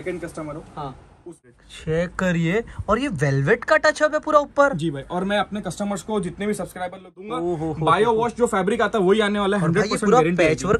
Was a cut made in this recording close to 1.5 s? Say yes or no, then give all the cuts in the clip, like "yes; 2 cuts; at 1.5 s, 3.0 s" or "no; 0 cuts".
yes; 2 cuts; at 1.5 s, 7.2 s